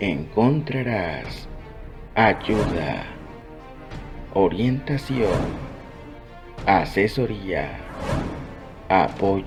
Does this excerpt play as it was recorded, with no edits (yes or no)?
yes